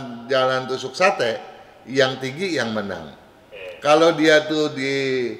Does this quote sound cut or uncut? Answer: uncut